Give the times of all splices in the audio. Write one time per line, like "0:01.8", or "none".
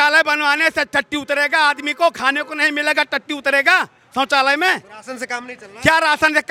none